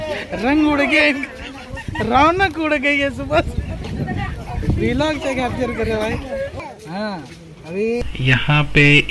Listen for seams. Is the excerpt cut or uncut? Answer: cut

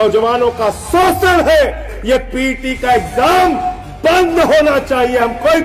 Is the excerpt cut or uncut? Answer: cut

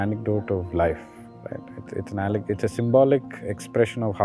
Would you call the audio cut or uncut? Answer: uncut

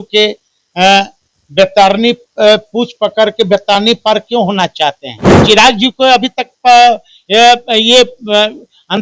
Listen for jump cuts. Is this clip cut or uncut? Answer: cut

